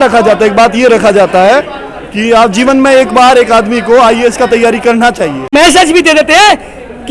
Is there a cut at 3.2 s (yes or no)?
no